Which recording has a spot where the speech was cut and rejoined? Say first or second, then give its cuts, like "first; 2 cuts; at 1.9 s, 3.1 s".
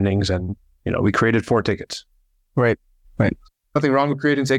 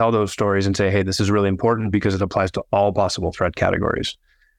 first; 1 cut; at 3.5 s